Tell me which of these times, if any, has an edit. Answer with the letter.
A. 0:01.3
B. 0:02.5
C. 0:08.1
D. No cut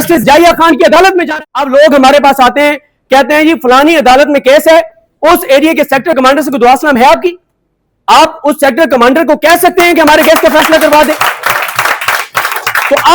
A